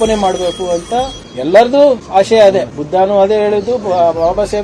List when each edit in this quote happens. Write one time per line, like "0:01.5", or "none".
0:01.2
0:02.0
0:02.8